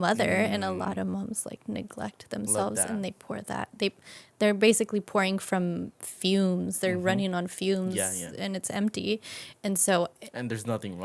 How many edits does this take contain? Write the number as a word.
zero